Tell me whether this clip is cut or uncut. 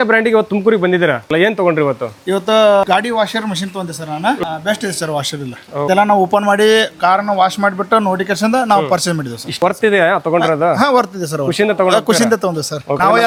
uncut